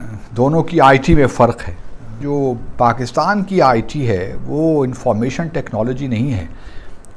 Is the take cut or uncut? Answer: cut